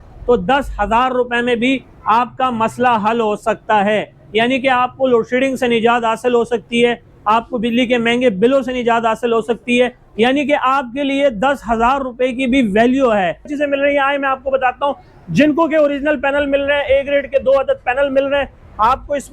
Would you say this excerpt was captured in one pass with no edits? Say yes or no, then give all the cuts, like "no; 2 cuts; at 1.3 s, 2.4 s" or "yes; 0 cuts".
no; 1 cut; at 13.5 s